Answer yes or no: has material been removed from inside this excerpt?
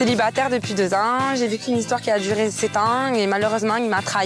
no